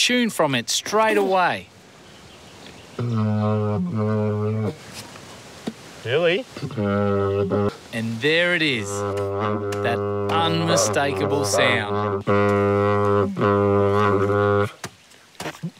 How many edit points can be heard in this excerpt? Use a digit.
1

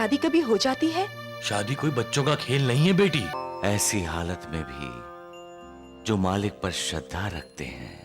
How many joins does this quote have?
1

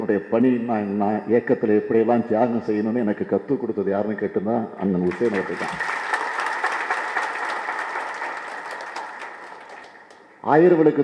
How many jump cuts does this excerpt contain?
1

